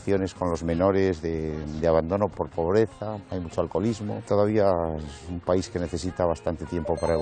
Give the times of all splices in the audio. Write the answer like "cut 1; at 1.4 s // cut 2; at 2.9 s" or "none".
cut 1; at 2.3 s // cut 2; at 3.2 s // cut 3; at 4.2 s

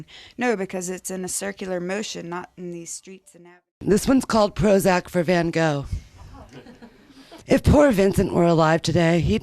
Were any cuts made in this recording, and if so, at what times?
cut 1; at 3.4 s // cut 2; at 7.3 s

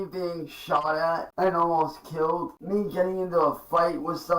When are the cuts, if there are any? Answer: cut 1; at 1.3 s // cut 2; at 2.6 s

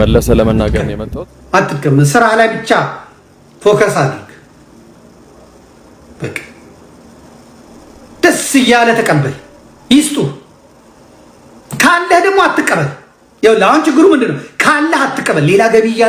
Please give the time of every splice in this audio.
cut 1; at 0.9 s

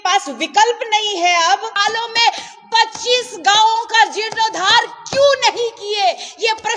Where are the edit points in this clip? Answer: cut 1; at 1.7 s

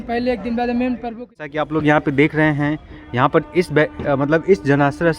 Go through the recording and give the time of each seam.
cut 1; at 1.4 s

